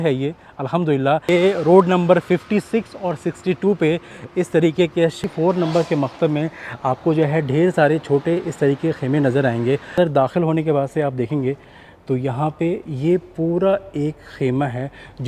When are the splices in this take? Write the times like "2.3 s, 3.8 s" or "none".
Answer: 1.3 s, 5.2 s, 9.9 s